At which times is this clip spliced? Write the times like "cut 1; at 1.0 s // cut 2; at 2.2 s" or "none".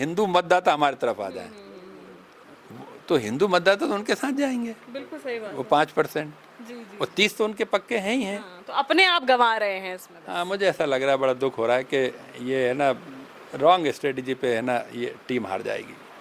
none